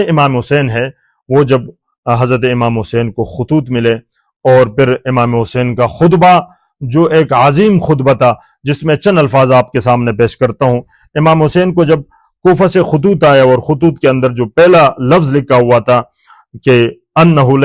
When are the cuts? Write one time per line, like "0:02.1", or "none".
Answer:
none